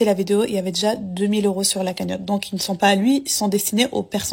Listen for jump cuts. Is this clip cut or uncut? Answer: uncut